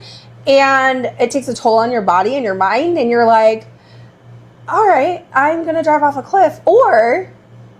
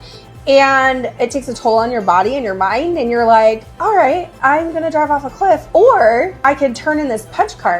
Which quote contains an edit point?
second; 2 cuts; at 3.7 s, 6.3 s

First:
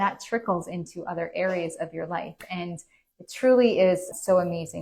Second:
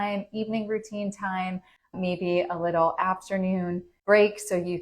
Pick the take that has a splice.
second; 1 cut; at 3.9 s

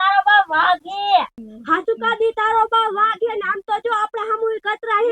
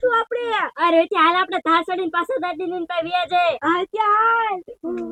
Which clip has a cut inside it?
first; 1 cut; at 1.3 s

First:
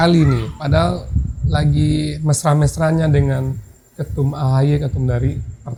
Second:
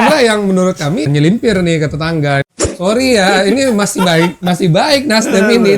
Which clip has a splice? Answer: second; 2 cuts; at 1.1 s, 2.4 s

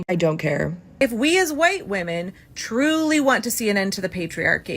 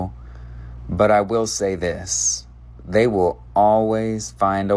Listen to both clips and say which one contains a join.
first; 1 cut; at 1.0 s

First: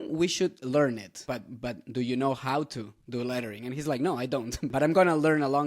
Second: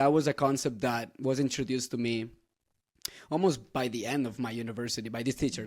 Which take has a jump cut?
first; 2 cuts; at 1.2 s, 4.6 s

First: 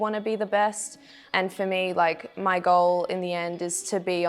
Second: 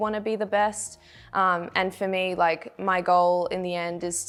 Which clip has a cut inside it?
first; 1 cut; at 1.2 s

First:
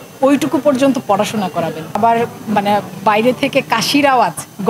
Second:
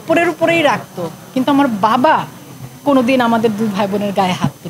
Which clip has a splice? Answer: first; 1 cut; at 2.0 s

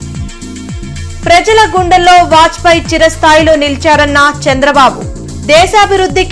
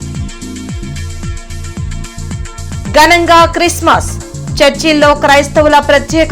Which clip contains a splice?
first; 1 cut; at 1.0 s

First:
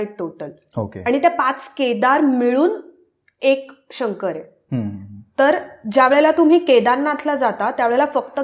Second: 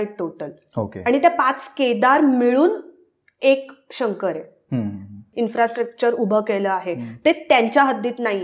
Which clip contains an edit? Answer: second; 1 cut; at 5.2 s

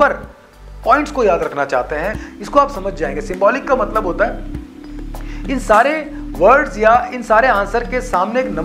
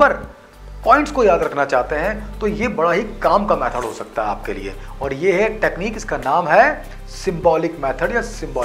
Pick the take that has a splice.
first; 1 cut; at 2.2 s

